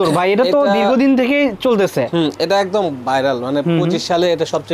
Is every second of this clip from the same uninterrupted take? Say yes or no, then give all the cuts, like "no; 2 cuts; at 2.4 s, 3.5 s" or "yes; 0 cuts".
yes; 0 cuts